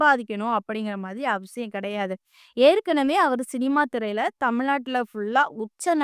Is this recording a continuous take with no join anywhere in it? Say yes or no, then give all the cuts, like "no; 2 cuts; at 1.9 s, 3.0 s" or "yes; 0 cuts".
yes; 0 cuts